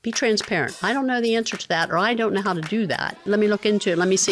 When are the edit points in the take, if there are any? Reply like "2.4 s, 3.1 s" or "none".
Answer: 3.2 s